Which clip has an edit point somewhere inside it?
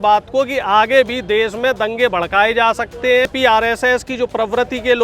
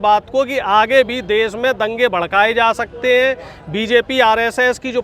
first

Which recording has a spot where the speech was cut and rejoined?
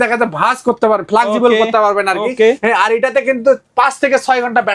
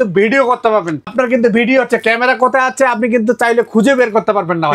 second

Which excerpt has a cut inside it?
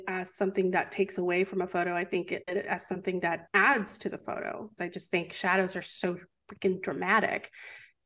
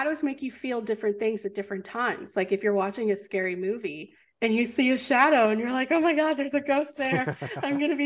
first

